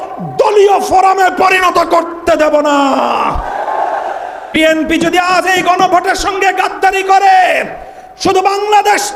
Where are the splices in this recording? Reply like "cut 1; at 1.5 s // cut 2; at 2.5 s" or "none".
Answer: cut 1; at 4.5 s